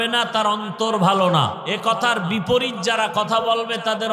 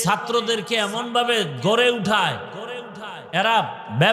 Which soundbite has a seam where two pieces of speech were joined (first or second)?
first